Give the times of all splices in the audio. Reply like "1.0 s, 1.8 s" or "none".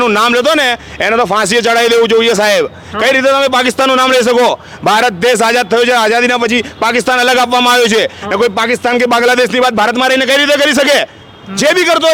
none